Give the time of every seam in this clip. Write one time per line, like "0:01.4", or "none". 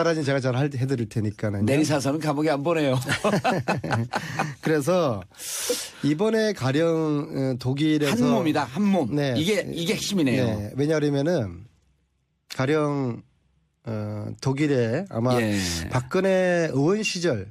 0:14.5